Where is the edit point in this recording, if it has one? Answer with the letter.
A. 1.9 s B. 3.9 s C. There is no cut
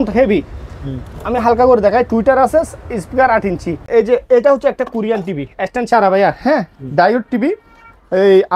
B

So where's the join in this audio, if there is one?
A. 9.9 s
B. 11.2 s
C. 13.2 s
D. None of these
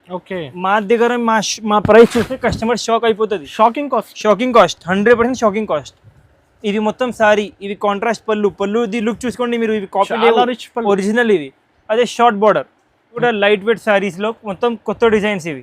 C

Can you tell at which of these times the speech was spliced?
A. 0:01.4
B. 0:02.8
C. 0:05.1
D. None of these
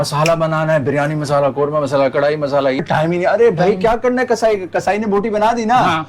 B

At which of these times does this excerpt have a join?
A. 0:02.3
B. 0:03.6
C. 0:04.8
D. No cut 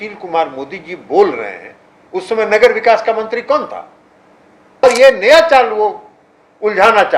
C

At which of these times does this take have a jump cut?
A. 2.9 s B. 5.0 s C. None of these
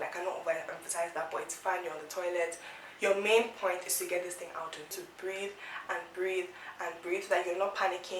B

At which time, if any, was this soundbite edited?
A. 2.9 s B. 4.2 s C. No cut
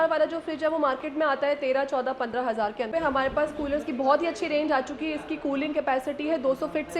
A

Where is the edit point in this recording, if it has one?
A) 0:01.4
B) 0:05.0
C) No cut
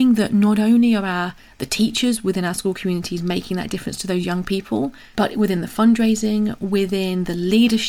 B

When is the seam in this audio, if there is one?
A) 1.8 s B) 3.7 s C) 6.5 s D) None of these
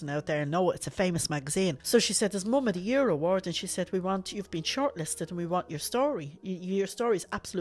A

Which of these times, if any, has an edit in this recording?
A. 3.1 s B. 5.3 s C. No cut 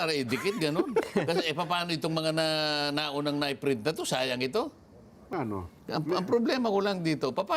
B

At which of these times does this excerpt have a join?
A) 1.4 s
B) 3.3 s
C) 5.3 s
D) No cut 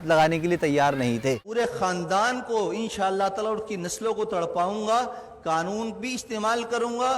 A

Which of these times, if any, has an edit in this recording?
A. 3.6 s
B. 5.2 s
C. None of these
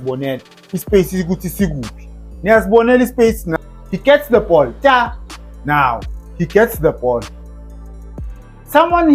A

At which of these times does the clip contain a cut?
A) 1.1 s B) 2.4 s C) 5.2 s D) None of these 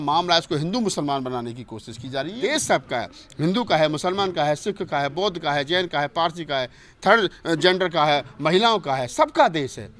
B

